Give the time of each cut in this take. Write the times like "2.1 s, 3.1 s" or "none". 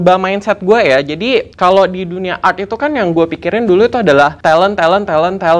1.5 s, 4.4 s